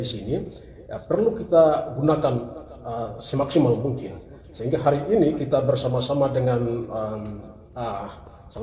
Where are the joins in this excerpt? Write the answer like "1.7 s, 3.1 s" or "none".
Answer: none

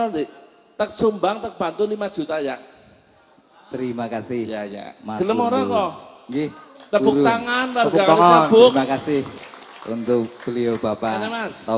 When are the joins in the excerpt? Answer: none

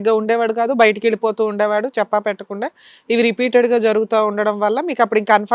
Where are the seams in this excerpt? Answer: none

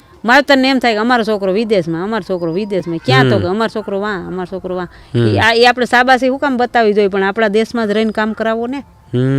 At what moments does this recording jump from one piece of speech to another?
none

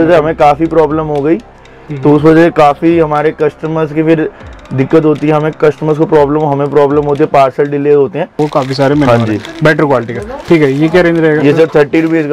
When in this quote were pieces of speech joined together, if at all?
8.5 s

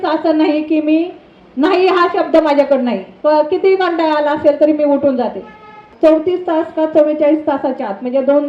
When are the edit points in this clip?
5.9 s

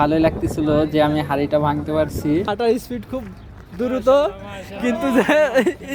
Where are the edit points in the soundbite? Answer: 2.5 s

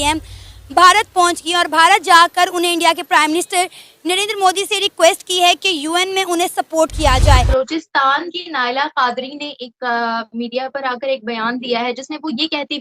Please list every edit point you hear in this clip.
7.5 s

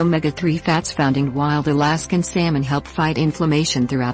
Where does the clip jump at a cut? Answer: 2.7 s

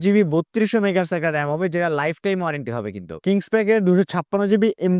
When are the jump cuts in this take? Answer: 3.1 s

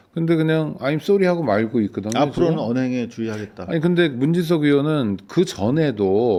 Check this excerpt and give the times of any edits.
none

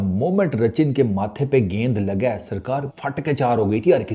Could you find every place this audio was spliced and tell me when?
3.0 s

